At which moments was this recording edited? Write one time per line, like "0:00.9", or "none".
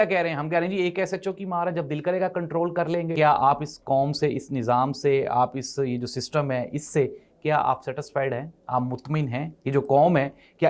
0:03.1